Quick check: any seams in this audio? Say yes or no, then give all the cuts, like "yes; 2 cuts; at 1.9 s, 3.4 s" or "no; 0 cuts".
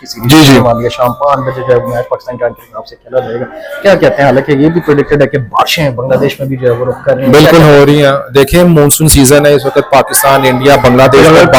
no; 0 cuts